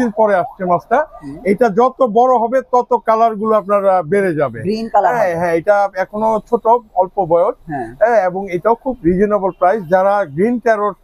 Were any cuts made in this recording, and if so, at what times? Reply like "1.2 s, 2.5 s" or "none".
none